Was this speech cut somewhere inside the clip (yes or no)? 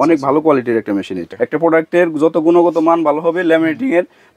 yes